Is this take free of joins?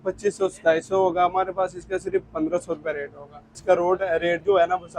no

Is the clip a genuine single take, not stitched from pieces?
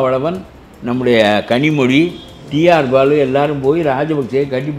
yes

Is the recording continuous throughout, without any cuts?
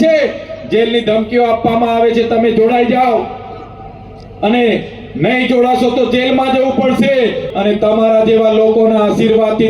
no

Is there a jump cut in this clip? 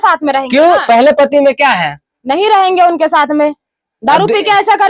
no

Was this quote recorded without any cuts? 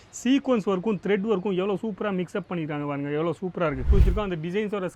no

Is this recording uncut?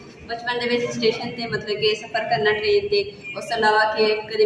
yes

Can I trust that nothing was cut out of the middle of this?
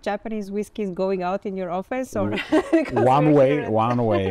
yes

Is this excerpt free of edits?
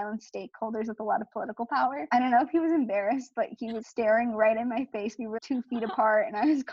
no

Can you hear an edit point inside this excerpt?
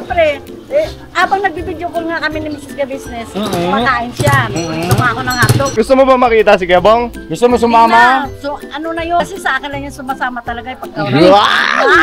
yes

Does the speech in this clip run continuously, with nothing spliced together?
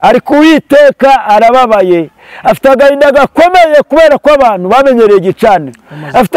yes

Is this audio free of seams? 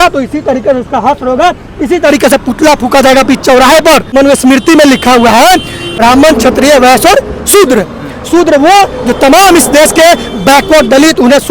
no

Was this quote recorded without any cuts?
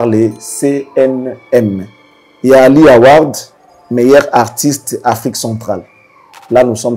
yes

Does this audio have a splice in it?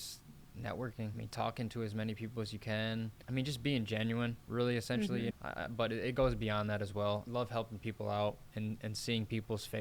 yes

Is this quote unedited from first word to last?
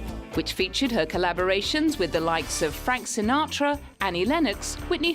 no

